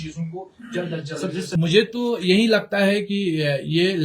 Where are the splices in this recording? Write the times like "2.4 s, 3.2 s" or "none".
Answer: 1.4 s